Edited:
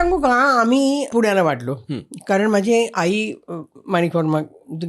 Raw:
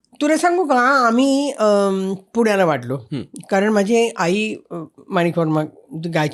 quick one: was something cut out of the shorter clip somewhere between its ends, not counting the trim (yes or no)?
yes